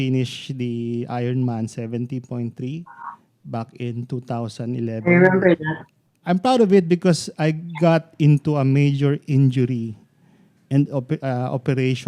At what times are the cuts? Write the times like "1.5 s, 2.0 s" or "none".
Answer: 6.2 s